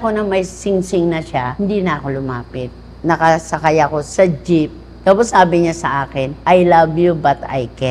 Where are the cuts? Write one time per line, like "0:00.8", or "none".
0:01.5
0:02.8
0:04.0
0:06.2